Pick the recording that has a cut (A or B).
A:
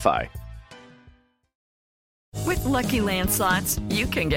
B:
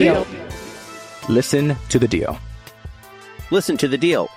A